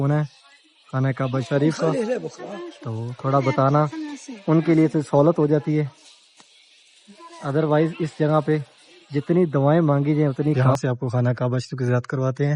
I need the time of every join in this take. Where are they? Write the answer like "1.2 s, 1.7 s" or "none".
10.7 s